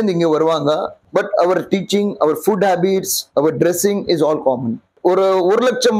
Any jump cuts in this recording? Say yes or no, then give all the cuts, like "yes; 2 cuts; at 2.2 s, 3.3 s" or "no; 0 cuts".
yes; 2 cuts; at 1.0 s, 4.9 s